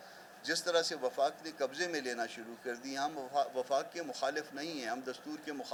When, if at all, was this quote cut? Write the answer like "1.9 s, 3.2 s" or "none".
none